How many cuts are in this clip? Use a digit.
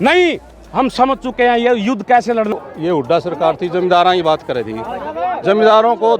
1